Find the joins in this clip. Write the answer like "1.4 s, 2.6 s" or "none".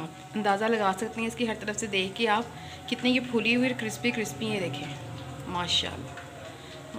none

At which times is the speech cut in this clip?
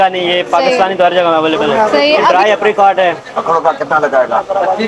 2.2 s

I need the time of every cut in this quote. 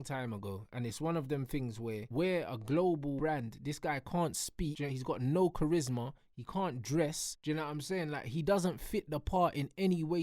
2.0 s, 3.2 s, 4.8 s, 7.3 s

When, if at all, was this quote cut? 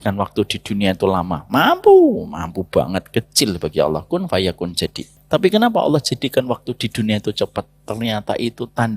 5.1 s

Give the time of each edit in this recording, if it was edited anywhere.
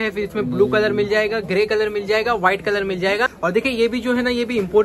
3.3 s

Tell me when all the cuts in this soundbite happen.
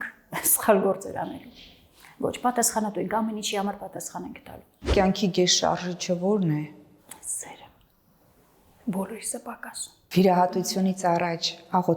4.9 s, 10.0 s

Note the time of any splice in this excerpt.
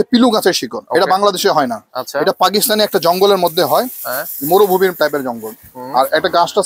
none

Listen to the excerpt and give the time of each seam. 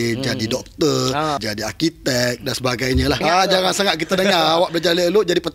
1.4 s, 3.2 s

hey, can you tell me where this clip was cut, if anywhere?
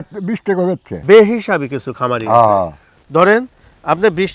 1.0 s

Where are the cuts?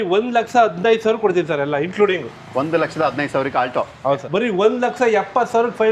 4.2 s

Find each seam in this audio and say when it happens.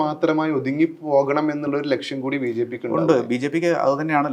none

